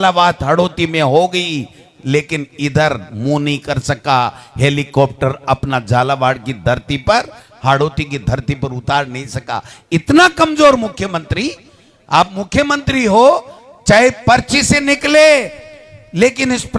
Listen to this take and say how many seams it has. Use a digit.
0